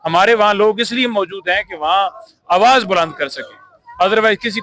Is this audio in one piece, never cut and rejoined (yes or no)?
yes